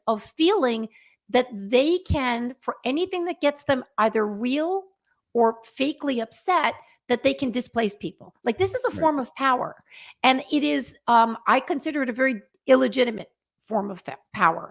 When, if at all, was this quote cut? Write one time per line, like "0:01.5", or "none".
none

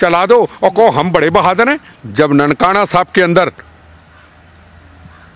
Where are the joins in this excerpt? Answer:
0:01.9

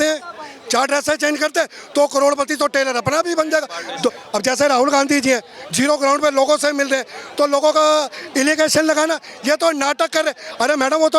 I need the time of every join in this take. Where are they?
0:04.2

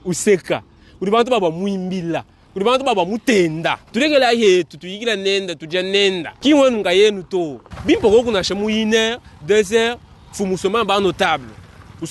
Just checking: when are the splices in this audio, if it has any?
0:03.8
0:06.3
0:07.6

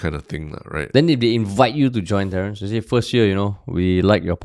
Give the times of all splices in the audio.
none

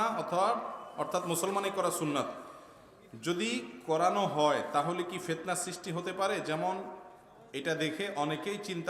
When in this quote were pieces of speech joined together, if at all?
none

